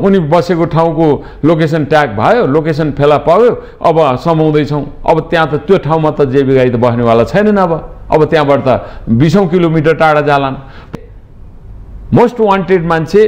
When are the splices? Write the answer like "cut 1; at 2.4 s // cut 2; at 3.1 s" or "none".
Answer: cut 1; at 10.9 s